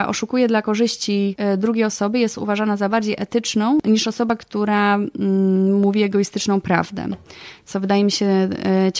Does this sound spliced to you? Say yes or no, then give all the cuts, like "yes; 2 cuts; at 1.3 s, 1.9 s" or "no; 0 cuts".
yes; 2 cuts; at 1.4 s, 3.8 s